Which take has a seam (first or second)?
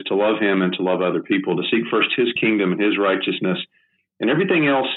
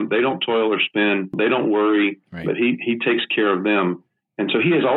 second